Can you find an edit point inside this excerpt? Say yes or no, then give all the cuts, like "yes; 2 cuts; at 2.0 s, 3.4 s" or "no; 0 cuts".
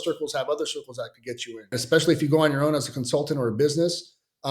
yes; 1 cut; at 1.7 s